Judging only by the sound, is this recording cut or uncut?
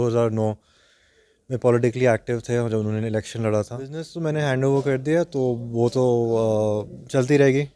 cut